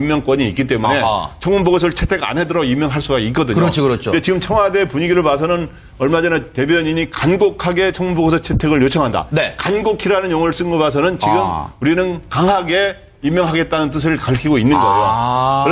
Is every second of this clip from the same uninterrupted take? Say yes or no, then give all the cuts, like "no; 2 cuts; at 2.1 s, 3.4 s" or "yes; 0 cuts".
yes; 0 cuts